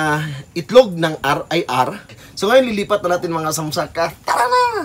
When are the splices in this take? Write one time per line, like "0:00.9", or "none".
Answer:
0:02.2